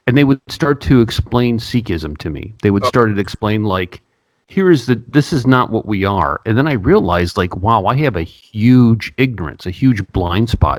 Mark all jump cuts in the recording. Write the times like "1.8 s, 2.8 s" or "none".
none

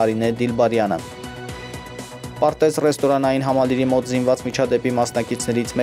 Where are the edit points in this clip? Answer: 1.0 s, 2.4 s

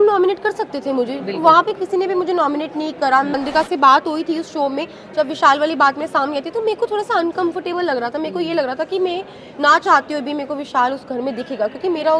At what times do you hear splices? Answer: 3.4 s

